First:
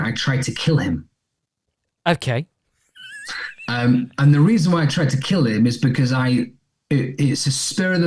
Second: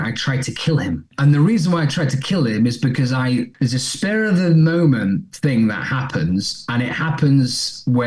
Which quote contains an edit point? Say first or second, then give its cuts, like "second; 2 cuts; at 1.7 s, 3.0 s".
second; 2 cuts; at 1.1 s, 3.5 s